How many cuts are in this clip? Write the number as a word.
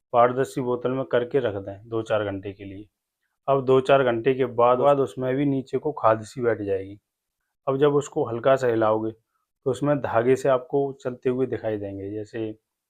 one